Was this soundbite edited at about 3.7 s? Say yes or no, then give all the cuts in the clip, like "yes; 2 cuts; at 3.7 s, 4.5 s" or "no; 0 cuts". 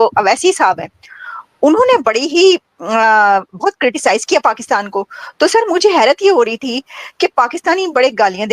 no; 0 cuts